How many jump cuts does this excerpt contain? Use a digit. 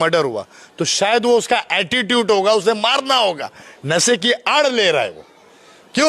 0